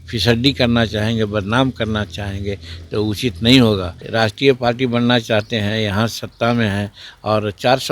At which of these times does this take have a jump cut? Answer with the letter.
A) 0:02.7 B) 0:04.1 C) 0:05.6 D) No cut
B